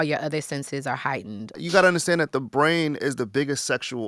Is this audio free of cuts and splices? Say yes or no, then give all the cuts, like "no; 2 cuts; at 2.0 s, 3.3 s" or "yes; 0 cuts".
no; 1 cut; at 1.6 s